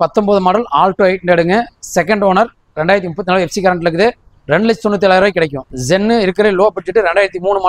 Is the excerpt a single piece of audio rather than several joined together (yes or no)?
yes